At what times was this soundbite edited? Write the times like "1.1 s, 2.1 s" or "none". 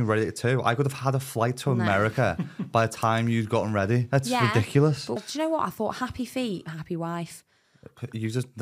5.2 s